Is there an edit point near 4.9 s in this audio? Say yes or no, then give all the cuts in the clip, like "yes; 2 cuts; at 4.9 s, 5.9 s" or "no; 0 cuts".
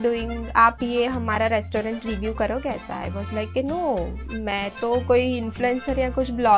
no; 0 cuts